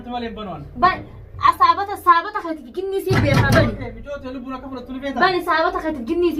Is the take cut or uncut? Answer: uncut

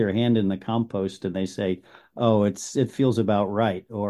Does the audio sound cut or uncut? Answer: uncut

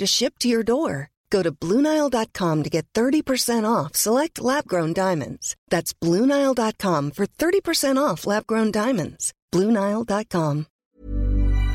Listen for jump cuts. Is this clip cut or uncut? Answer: cut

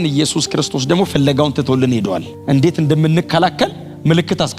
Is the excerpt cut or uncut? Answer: uncut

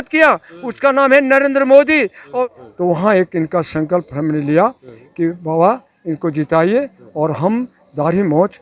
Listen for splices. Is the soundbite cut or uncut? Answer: cut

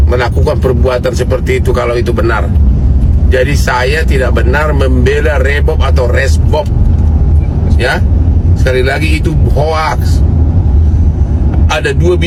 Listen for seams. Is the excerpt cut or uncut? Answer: uncut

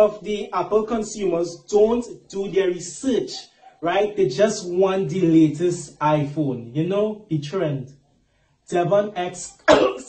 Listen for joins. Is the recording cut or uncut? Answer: cut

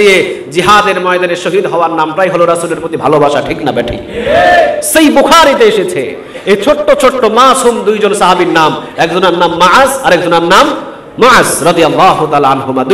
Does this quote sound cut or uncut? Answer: uncut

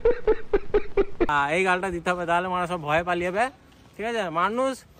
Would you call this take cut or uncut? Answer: uncut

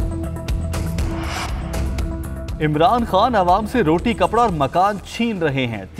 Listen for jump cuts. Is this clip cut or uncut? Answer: cut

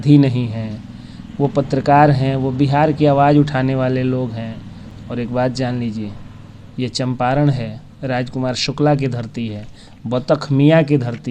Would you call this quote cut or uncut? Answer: uncut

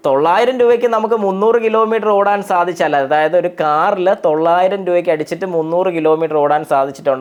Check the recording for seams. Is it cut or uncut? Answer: uncut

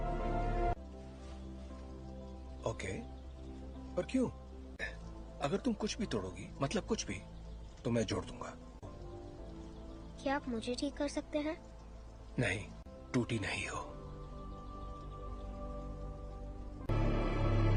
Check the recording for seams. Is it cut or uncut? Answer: uncut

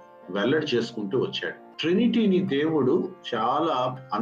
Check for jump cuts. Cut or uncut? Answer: cut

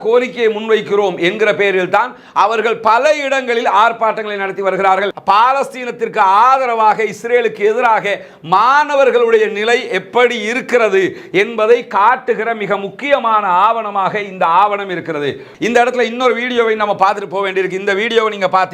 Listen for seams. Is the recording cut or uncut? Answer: cut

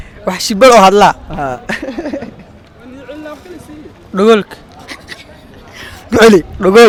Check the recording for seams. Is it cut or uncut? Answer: uncut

